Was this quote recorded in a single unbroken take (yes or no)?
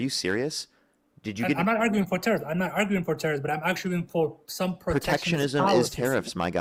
yes